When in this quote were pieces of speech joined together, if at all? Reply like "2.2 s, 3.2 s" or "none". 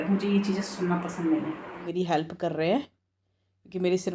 1.8 s